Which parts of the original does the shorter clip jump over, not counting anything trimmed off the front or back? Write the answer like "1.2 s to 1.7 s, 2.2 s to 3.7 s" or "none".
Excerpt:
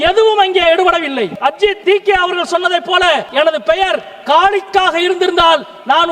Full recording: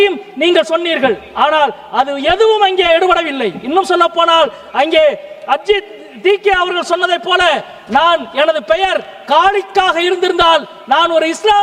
3.7 s to 5.8 s, 7.6 s to 8.3 s